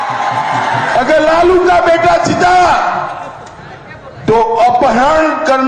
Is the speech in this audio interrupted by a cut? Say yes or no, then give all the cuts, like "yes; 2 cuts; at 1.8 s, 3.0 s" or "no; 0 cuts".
no; 0 cuts